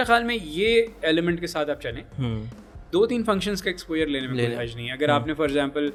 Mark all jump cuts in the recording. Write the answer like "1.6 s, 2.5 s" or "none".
none